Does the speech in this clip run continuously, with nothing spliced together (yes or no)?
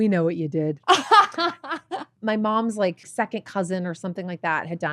no